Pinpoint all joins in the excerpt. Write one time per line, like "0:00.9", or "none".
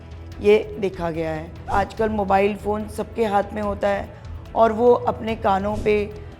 0:01.7